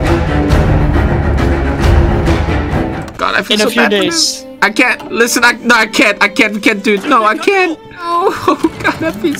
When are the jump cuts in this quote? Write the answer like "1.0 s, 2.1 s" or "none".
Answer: 3.0 s, 8.0 s